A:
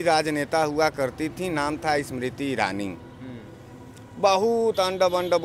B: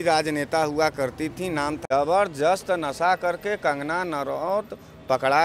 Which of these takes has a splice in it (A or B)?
B